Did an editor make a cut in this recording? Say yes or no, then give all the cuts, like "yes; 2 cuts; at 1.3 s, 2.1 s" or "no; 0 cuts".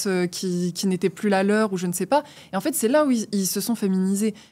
no; 0 cuts